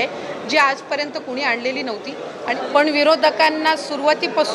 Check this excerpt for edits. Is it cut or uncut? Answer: cut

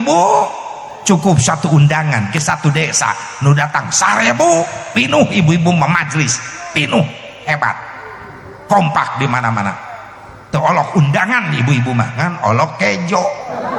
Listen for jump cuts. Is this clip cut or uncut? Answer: uncut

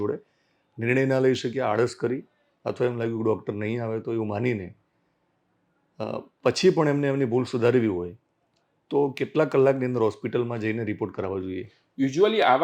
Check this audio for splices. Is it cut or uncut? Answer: uncut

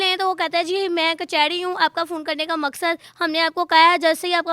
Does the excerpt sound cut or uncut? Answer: cut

